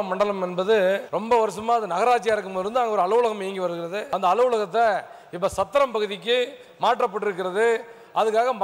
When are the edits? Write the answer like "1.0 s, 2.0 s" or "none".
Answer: 1.1 s, 4.0 s